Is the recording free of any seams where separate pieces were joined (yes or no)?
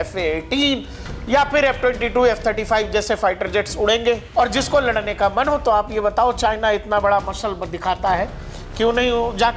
no